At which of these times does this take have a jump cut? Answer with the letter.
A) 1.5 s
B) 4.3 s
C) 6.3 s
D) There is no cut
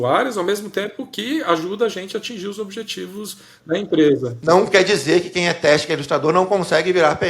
B